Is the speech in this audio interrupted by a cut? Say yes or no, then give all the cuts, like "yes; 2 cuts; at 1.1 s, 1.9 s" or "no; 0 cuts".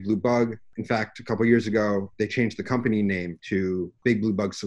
yes; 2 cuts; at 2.1 s, 3.3 s